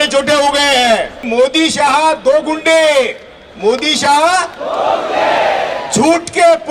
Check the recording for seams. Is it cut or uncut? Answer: cut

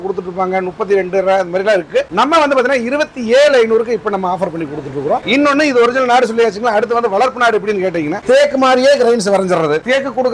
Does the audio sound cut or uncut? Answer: uncut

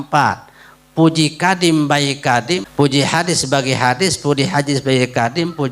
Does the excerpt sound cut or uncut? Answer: cut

